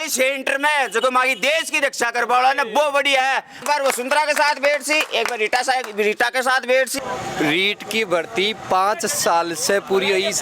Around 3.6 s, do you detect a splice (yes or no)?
yes